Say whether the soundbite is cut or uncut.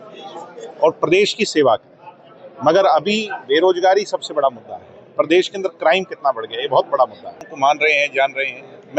cut